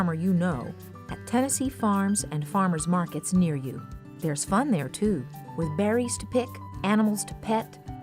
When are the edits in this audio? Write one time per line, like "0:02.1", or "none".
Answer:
none